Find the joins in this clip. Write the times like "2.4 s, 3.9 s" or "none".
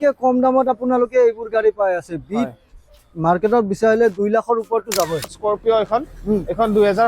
5.3 s

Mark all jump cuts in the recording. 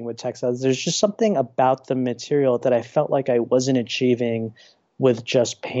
none

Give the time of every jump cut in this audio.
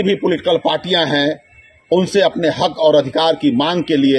none

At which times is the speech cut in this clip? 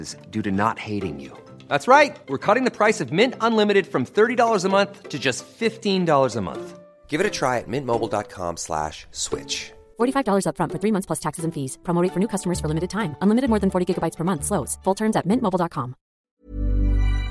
16.4 s

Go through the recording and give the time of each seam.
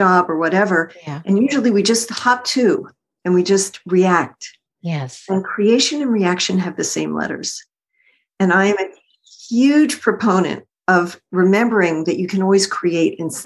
none

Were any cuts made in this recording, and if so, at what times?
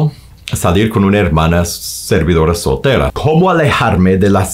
3.2 s

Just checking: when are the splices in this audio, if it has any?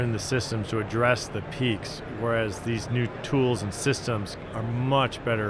none

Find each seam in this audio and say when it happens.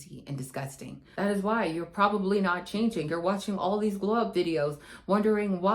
1.0 s

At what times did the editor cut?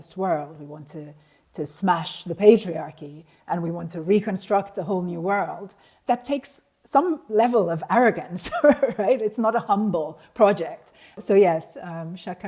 5.9 s, 11.1 s

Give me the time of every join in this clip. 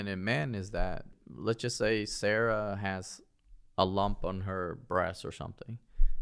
1.2 s

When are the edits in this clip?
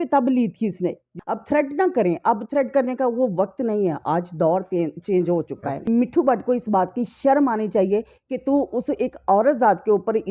1.1 s, 5.9 s

